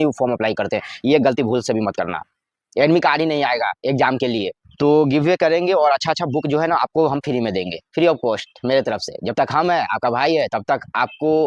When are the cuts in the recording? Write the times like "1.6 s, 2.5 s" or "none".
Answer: 4.6 s